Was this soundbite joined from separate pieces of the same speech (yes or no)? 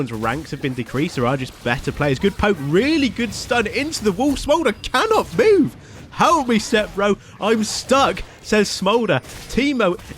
no